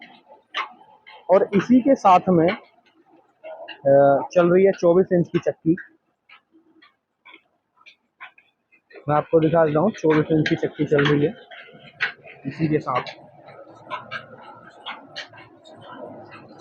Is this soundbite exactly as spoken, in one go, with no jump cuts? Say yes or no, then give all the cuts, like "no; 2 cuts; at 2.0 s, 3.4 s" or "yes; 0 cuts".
yes; 0 cuts